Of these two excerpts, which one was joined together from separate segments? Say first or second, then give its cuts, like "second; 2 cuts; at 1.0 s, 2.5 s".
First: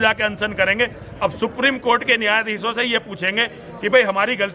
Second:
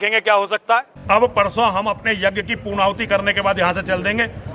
second; 1 cut; at 0.9 s